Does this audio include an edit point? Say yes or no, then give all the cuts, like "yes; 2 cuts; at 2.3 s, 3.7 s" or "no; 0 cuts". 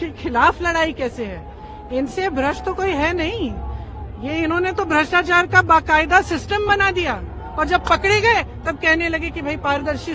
no; 0 cuts